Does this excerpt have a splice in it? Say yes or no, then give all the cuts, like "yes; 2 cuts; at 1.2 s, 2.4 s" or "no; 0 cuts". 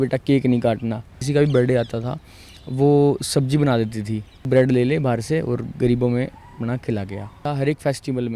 yes; 3 cuts; at 1.2 s, 4.4 s, 7.4 s